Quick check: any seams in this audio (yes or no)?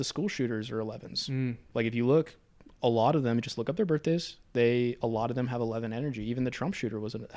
no